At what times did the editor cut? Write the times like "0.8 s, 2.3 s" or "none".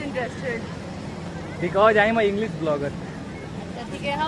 none